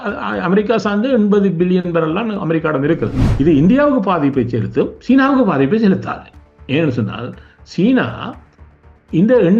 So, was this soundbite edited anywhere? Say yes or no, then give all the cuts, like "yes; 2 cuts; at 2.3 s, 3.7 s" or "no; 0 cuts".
yes; 1 cut; at 3.2 s